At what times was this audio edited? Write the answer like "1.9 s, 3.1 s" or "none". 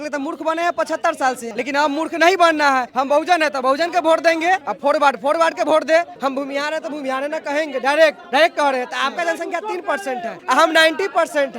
1.5 s, 2.9 s, 4.7 s, 6.1 s, 8.2 s, 10.4 s